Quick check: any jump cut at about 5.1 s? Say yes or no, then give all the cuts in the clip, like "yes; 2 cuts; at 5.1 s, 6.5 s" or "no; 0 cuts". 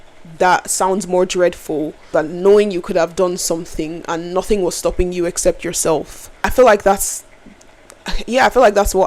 no; 2 cuts; at 2.0 s, 6.5 s